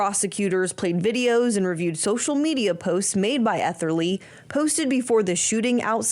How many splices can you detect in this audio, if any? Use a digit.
0